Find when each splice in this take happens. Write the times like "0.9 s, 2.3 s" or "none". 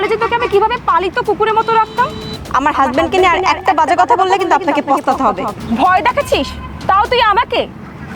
2.4 s